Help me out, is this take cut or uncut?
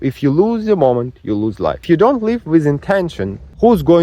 cut